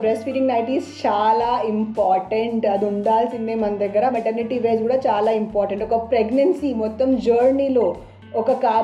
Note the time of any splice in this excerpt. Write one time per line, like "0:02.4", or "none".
0:04.1